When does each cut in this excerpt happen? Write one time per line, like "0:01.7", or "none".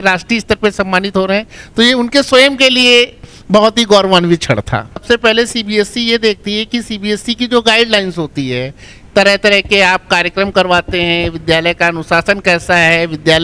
0:05.0